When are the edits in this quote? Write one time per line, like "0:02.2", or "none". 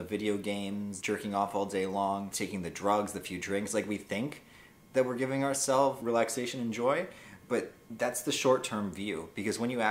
0:01.0
0:02.3
0:06.0
0:07.8